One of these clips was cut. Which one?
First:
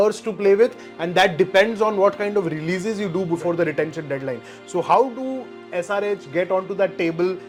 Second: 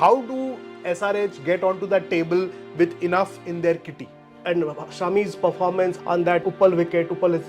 second; 2 cuts; at 4.3 s, 6.1 s

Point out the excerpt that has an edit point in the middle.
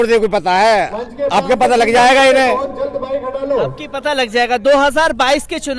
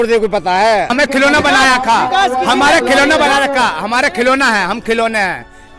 second; 1 cut; at 0.9 s

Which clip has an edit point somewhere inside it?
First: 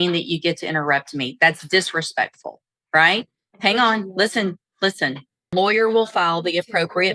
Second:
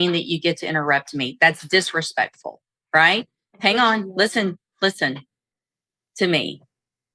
first; 1 cut; at 5.5 s

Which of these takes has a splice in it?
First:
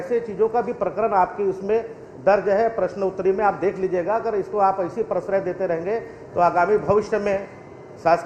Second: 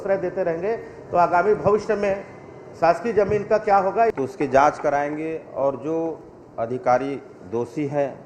second; 1 cut; at 4.1 s

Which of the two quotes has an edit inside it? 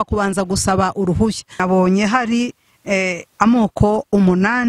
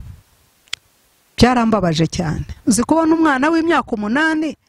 first; 1 cut; at 1.6 s

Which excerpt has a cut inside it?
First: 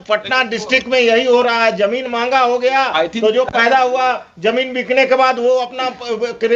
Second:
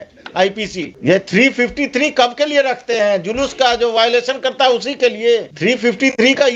second; 2 cuts; at 0.9 s, 5.5 s

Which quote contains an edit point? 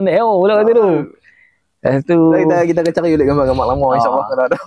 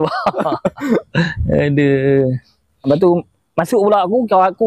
second; 1 cut; at 2.9 s

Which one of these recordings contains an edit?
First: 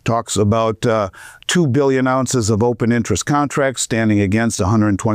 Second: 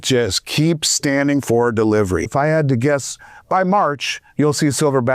second; 1 cut; at 2.3 s

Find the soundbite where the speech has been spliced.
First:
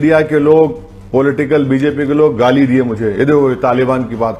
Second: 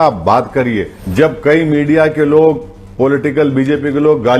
second; 1 cut; at 1.0 s

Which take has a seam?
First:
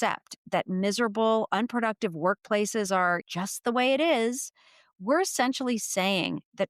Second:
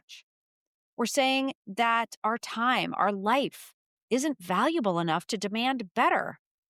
first; 1 cut; at 3.2 s

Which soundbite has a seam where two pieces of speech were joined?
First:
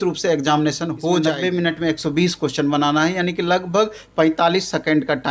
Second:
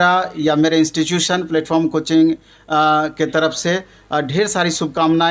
first; 1 cut; at 1.3 s

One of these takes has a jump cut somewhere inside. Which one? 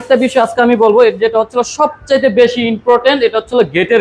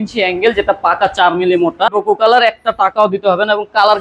second; 1 cut; at 2.0 s

